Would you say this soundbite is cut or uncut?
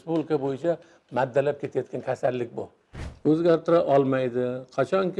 cut